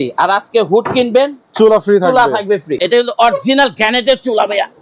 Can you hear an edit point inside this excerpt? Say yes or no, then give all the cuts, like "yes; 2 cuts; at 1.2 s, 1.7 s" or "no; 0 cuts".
yes; 1 cut; at 2.8 s